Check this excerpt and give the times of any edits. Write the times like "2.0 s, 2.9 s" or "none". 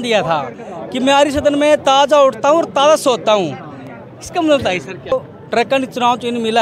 5.1 s